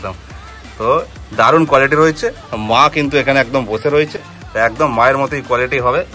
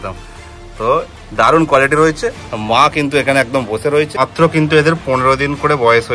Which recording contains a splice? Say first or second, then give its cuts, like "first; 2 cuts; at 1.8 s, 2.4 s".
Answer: second; 1 cut; at 4.2 s